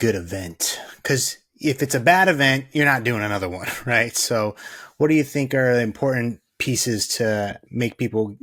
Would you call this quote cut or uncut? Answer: uncut